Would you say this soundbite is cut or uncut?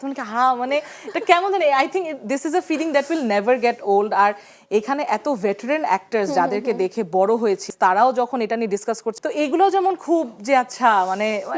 cut